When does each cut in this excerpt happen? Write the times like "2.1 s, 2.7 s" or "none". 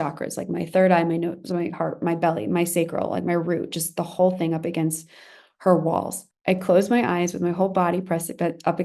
6.2 s